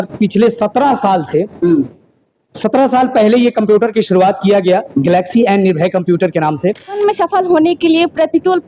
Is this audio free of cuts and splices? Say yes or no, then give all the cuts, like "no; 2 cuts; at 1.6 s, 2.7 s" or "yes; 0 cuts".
no; 1 cut; at 7.0 s